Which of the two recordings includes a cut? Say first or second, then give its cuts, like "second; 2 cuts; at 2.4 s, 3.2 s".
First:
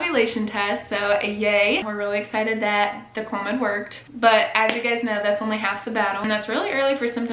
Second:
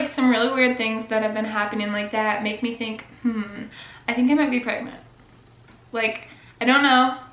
first; 2 cuts; at 1.9 s, 6.2 s